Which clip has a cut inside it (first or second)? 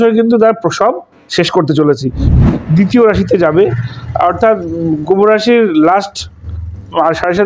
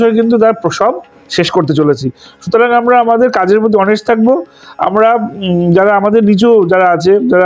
first